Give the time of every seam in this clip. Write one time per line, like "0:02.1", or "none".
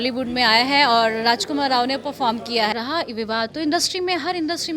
0:02.7

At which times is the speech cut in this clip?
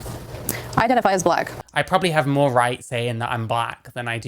0:01.6

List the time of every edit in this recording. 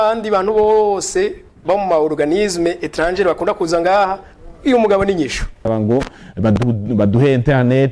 0:05.6

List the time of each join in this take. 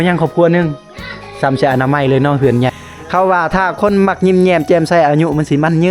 0:02.7

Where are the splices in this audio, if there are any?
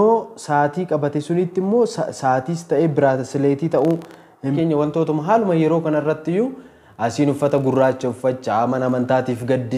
0:04.5

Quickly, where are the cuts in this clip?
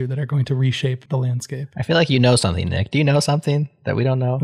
0:01.0

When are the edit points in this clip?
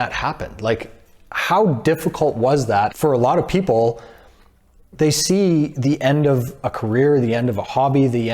0:02.9

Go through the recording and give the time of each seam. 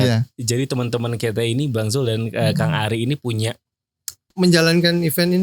0:04.3

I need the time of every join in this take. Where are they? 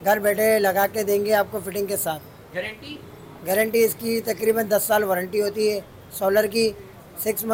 none

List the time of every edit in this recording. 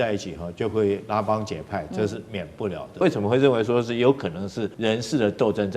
0:03.0
0:04.7

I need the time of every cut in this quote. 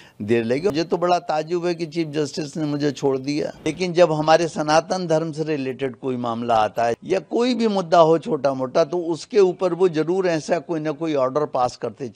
0:00.7
0:03.7
0:07.0

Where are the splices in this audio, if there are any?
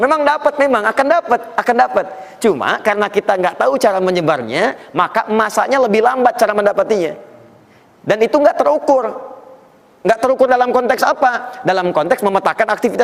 none

